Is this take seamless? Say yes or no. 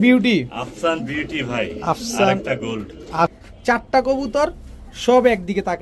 no